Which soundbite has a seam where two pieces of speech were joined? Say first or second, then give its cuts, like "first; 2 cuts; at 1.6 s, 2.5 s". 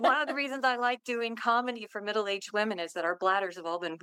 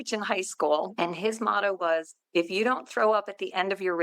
second; 1 cut; at 0.9 s